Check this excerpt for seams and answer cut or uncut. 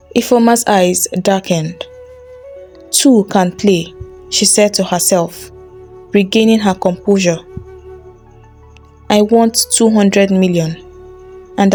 uncut